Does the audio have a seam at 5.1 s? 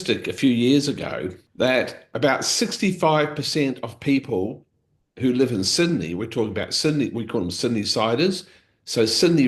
no; 2 cuts; at 1.4 s, 2.1 s

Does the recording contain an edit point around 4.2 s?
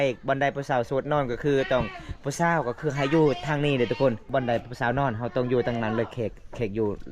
yes; 1 cut; at 4.2 s

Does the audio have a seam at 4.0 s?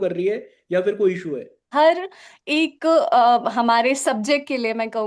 no; 1 cut; at 1.7 s

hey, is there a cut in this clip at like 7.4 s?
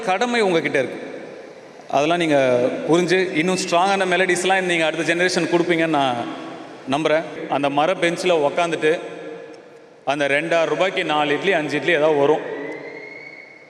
yes; 1 cut; at 7.4 s

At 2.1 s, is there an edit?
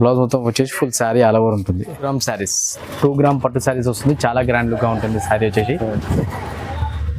yes; 1 cut; at 2.1 s

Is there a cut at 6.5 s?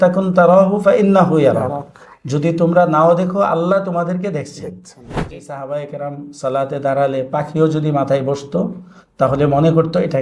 no; 1 cut; at 5.2 s

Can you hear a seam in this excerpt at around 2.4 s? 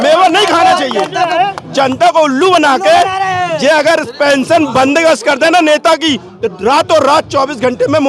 no; 0 cuts

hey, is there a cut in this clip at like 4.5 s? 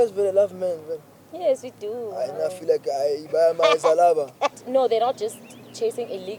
yes; 1 cut; at 4.5 s

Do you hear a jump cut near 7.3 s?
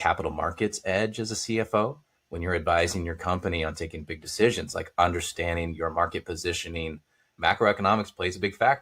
yes; 1 cut; at 7.3 s

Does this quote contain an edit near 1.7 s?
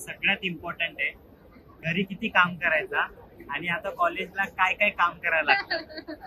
yes; 1 cut; at 1.7 s

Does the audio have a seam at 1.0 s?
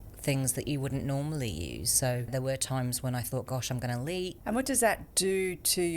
no; 3 cuts; at 2.3 s, 4.4 s, 5.1 s

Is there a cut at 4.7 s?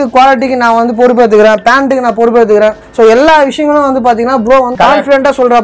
yes; 1 cut; at 4.7 s

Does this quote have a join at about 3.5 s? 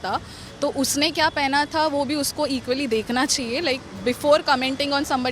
no; 0 cuts

